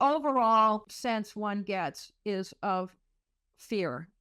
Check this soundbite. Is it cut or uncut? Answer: cut